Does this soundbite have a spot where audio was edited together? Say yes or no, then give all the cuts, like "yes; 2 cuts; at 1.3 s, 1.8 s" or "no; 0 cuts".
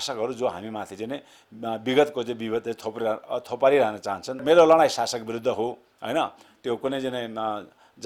yes; 1 cut; at 4.4 s